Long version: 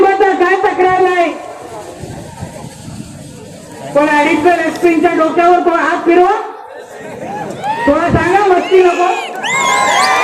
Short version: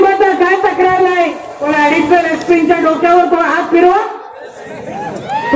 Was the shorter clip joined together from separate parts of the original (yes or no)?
yes